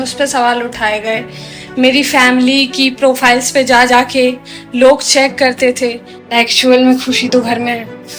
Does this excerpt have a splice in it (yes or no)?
yes